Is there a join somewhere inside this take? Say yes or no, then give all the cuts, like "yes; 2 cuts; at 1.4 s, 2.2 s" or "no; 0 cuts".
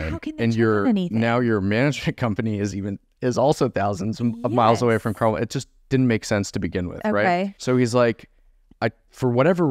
yes; 1 cut; at 7.6 s